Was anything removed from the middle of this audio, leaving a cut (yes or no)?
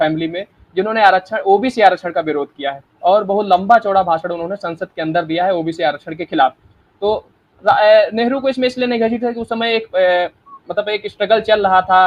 no